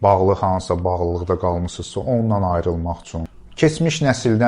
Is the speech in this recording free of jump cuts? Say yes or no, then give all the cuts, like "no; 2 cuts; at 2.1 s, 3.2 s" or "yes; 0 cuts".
no; 1 cut; at 3.2 s